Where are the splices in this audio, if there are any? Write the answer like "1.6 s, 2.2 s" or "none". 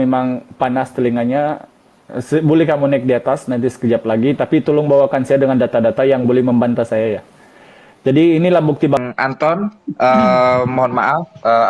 9.0 s